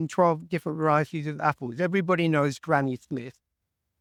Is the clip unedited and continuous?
yes; 0 cuts

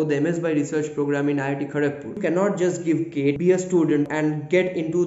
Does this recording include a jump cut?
yes; 3 cuts; at 2.2 s, 3.4 s, 4.1 s

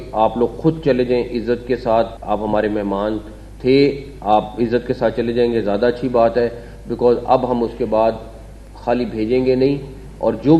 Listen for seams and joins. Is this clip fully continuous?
no; 1 cut; at 2.2 s

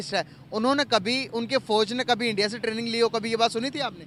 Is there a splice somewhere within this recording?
no; 0 cuts

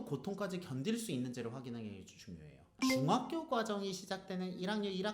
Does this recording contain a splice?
yes; 1 cut; at 2.9 s

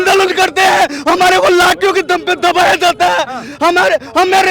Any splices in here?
no; 0 cuts

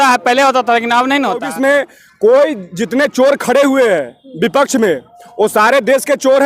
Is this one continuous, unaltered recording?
no; 1 cut; at 1.4 s

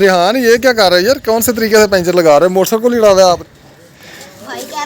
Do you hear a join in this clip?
yes; 1 cut; at 3.4 s

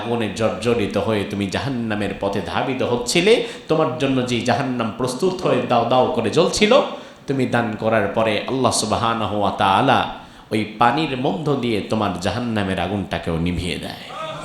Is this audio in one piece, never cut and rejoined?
yes; 0 cuts

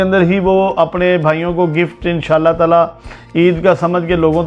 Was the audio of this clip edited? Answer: no; 0 cuts

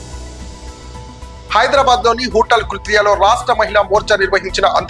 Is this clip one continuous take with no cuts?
no; 1 cut; at 1.4 s

